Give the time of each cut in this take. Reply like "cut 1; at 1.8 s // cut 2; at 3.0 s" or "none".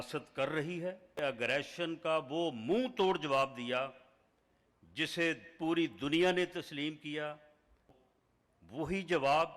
cut 1; at 1.2 s // cut 2; at 8.0 s